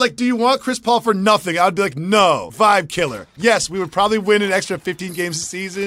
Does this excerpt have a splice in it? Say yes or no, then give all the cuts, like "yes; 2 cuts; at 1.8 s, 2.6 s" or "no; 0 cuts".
yes; 1 cut; at 2.5 s